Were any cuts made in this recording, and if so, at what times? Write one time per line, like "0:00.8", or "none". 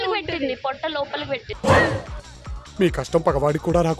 0:01.5

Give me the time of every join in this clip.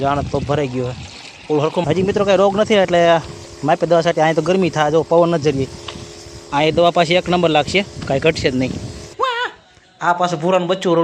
0:01.8
0:09.1

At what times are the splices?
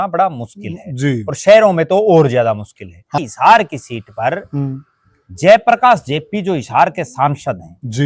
0:03.1

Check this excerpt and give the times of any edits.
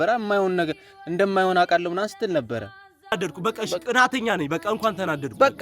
0:03.1

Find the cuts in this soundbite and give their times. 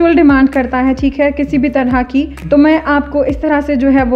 0:02.4

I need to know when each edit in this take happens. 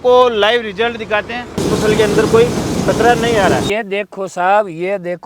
0:01.6
0:03.7

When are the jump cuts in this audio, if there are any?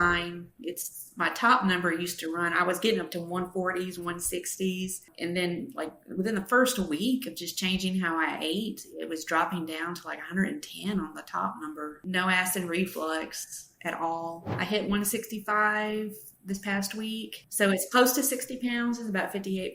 0:12.0
0:14.5

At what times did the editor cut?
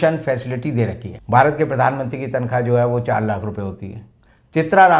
0:01.1

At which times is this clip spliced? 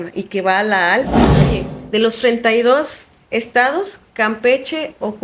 0:01.5

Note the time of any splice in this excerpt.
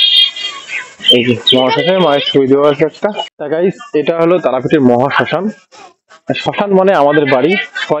0:03.3

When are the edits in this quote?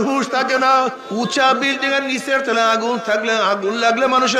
0:01.0

